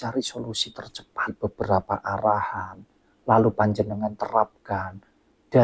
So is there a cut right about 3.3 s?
no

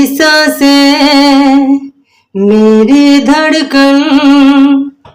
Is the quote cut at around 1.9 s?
no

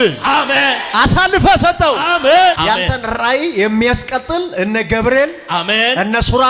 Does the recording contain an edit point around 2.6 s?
yes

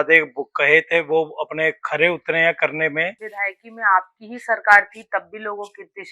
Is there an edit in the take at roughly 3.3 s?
yes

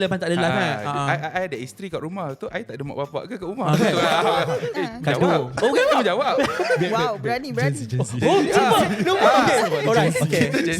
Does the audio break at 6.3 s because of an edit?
no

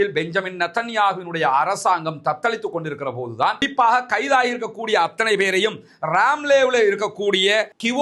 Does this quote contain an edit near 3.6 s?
yes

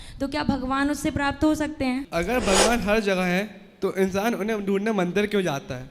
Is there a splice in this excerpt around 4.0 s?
no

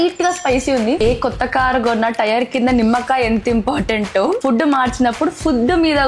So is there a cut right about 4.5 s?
no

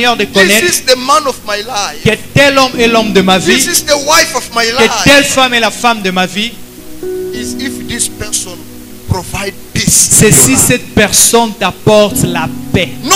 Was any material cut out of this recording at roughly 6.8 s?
no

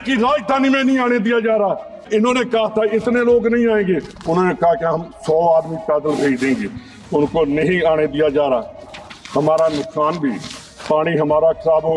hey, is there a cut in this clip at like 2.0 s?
yes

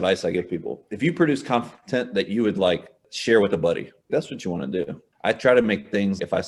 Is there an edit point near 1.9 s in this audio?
no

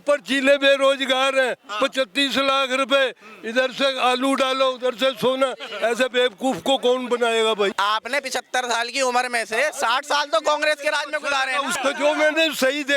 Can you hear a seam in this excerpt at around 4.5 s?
no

